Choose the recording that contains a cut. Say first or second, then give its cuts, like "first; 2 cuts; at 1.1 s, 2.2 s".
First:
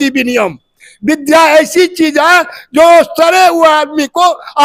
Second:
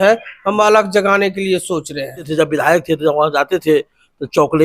second; 1 cut; at 2.3 s